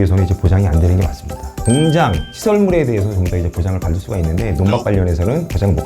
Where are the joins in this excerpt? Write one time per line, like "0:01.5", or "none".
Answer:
0:01.6